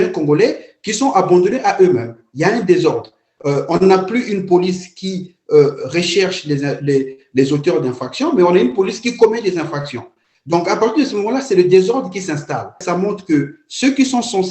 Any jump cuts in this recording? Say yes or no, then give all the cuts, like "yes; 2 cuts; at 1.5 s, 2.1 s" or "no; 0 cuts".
yes; 2 cuts; at 2.2 s, 12.8 s